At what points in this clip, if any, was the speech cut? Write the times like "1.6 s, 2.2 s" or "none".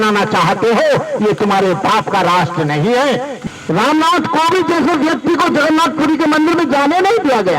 3.3 s